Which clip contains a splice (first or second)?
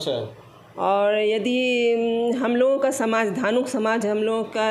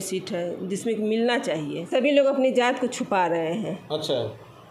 second